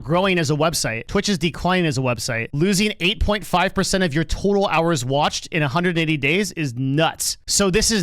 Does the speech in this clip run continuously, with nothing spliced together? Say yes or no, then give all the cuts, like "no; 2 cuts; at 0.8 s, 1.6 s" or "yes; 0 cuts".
no; 2 cuts; at 0.9 s, 2.4 s